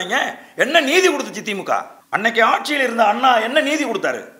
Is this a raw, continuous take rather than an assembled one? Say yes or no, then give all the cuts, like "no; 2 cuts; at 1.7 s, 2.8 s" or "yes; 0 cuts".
no; 1 cut; at 2.0 s